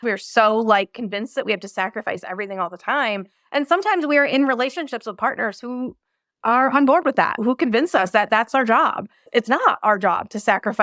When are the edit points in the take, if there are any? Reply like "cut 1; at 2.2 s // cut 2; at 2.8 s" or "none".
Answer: none